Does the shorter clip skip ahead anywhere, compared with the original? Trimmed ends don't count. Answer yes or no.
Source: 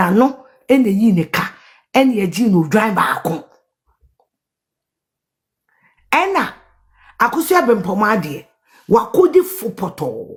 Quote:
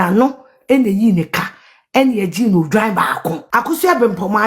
yes